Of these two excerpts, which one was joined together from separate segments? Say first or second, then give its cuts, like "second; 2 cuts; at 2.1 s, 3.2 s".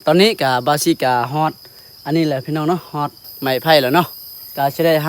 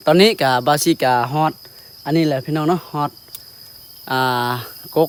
first; 1 cut; at 3.2 s